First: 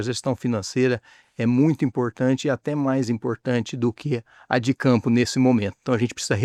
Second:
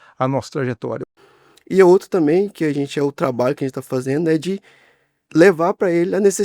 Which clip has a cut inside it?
second; 1 cut; at 1.1 s

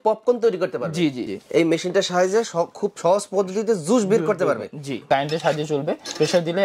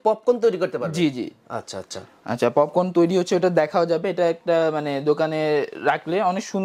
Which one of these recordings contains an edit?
first; 2 cuts; at 1.4 s, 5.1 s

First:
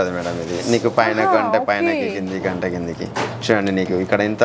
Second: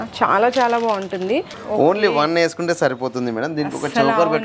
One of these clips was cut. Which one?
second; 1 cut; at 1.6 s

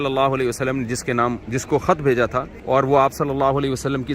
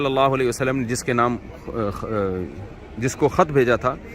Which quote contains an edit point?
first; 2 cuts; at 1.4 s, 2.5 s

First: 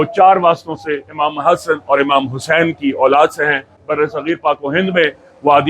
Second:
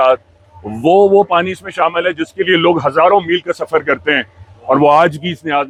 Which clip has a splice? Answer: first; 1 cut; at 3.8 s

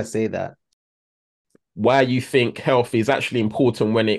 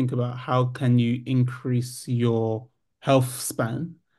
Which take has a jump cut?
first; 1 cut; at 0.9 s

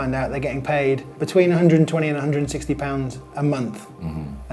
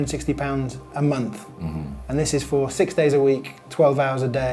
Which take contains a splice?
first; 1 cut; at 1.1 s

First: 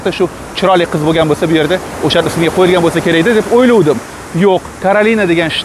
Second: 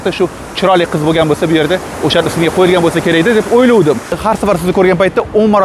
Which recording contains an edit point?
second; 1 cut; at 4.1 s

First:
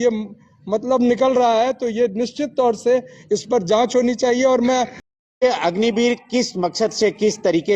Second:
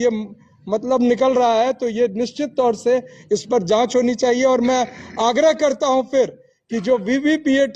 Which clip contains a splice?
first; 1 cut; at 5.0 s

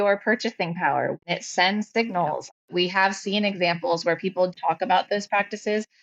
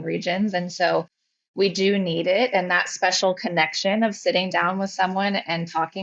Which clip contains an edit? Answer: first; 3 cuts; at 1.2 s, 2.7 s, 4.5 s

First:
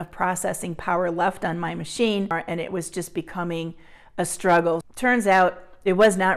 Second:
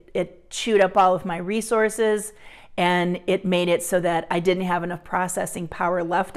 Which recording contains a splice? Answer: first; 2 cuts; at 2.4 s, 4.8 s

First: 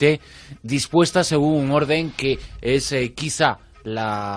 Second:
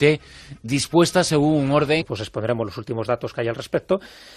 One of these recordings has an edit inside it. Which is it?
first; 1 cut; at 2.1 s

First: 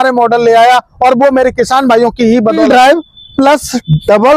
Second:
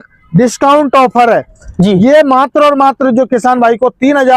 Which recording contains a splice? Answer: first; 1 cut; at 2.6 s

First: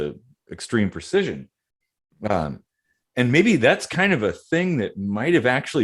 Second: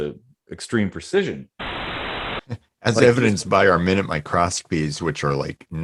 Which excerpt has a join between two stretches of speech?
second; 1 cut; at 2.1 s

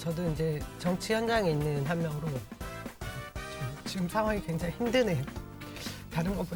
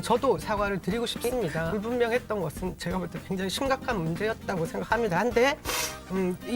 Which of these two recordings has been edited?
second; 1 cut; at 1.7 s

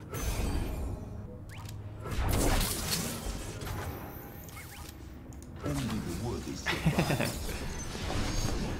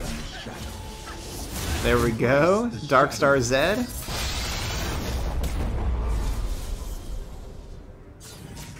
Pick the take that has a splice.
first; 1 cut; at 1.2 s

